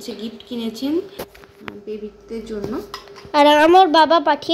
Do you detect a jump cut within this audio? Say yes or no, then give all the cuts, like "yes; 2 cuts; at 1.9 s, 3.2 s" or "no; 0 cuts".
no; 0 cuts